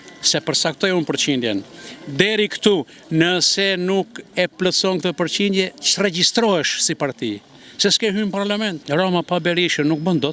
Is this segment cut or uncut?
cut